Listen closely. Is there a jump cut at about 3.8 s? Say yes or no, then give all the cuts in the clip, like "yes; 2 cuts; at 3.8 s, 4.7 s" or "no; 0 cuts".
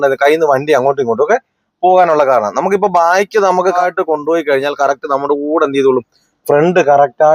yes; 1 cut; at 3.8 s